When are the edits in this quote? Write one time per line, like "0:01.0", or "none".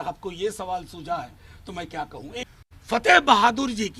0:02.4